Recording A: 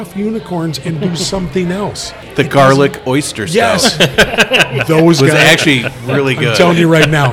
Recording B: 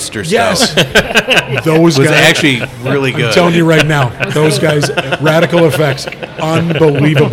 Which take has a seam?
A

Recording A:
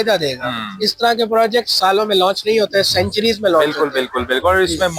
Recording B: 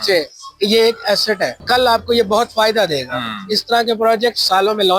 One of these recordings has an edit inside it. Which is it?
B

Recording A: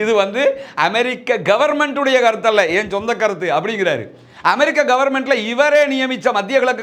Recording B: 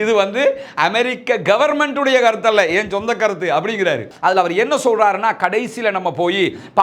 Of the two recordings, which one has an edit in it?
B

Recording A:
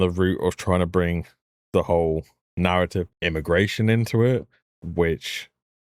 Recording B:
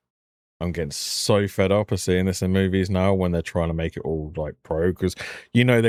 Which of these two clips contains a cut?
A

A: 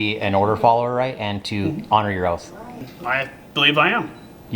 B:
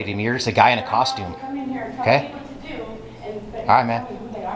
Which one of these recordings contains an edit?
A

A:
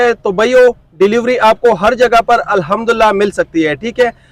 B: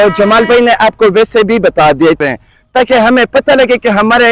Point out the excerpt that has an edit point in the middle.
B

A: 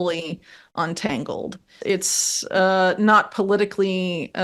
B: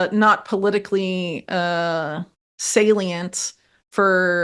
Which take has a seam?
A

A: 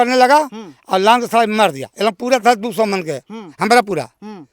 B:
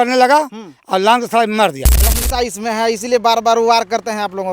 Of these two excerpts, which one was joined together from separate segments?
B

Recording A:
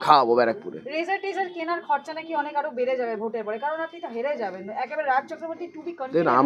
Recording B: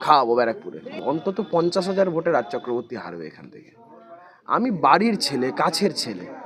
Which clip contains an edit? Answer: B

